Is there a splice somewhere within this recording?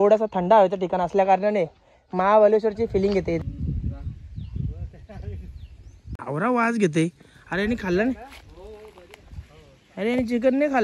yes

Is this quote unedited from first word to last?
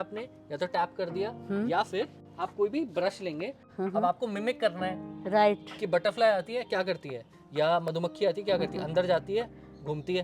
no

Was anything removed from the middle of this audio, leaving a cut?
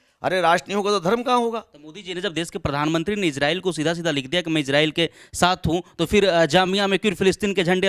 no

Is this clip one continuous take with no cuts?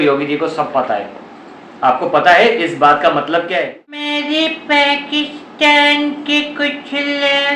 no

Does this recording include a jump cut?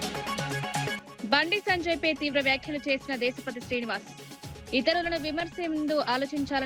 yes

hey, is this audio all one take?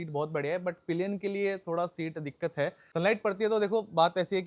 no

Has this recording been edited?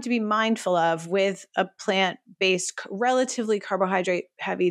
no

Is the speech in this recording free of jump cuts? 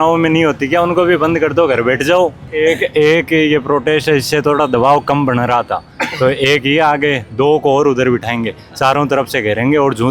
no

